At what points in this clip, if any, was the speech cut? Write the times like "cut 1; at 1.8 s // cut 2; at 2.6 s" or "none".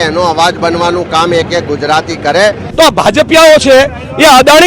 cut 1; at 2.6 s